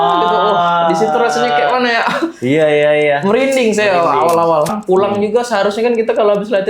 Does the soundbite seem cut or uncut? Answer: cut